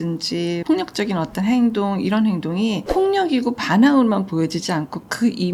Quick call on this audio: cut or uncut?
uncut